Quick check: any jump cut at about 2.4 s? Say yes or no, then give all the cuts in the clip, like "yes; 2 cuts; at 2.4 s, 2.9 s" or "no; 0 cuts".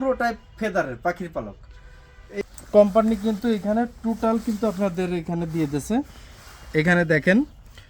yes; 1 cut; at 2.4 s